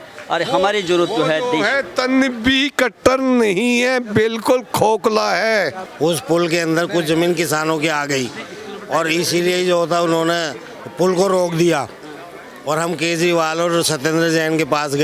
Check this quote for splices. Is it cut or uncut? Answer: uncut